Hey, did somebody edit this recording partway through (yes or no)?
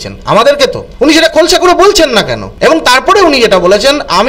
yes